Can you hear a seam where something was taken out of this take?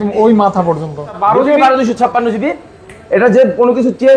yes; 1 cut; at 1.1 s

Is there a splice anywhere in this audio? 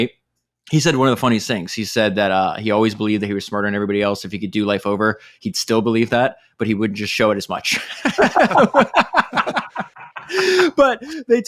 no; 0 cuts

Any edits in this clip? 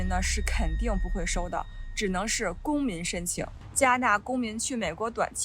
yes; 1 cut; at 3.6 s

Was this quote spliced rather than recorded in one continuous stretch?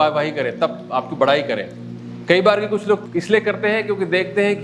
yes; 1 cut; at 3.0 s

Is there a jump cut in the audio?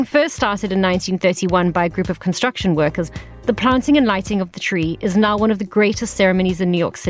yes; 1 cut; at 3.1 s

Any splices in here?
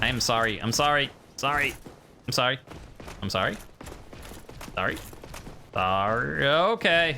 yes; 1 cut; at 5.6 s

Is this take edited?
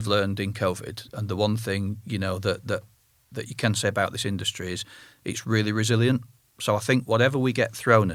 no; 0 cuts

